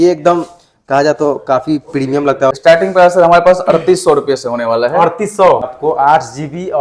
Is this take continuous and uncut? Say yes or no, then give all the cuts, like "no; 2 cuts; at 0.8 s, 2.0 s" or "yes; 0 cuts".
no; 2 cuts; at 2.5 s, 5.7 s